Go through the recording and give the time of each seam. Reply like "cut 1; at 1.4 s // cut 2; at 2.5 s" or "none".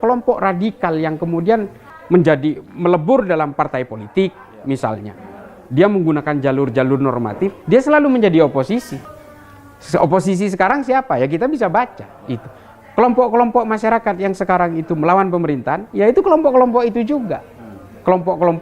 none